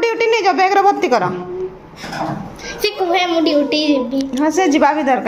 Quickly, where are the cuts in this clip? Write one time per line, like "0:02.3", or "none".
none